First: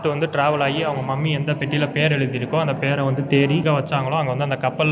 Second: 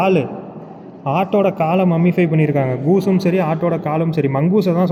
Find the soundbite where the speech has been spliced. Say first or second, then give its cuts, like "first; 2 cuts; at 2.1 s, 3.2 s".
first; 1 cut; at 3.6 s